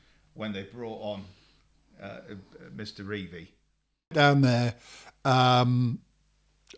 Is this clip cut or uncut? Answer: cut